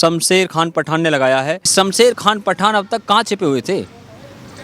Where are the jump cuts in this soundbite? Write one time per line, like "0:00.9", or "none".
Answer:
0:01.7